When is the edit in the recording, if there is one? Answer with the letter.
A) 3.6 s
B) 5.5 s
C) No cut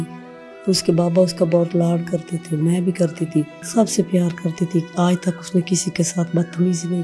A